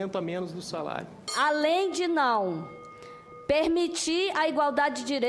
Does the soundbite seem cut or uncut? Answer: cut